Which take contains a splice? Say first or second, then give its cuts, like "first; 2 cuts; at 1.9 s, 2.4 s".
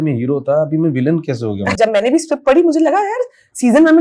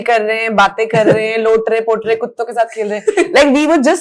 first; 1 cut; at 1.7 s